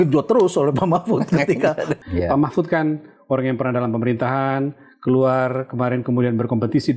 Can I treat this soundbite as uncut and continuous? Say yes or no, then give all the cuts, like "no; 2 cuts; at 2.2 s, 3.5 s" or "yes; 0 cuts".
no; 1 cut; at 2.0 s